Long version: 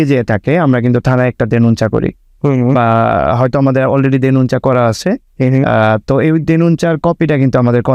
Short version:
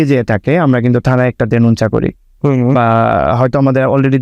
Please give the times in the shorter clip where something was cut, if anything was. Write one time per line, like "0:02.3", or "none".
none